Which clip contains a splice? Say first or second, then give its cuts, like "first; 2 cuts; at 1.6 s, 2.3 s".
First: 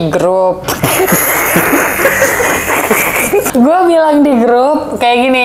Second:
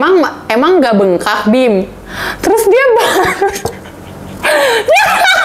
first; 1 cut; at 3.5 s